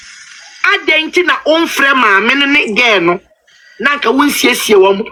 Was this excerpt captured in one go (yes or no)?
yes